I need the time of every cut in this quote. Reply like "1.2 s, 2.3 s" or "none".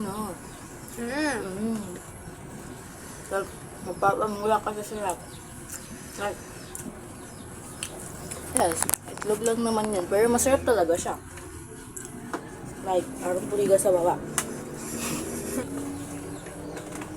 15.7 s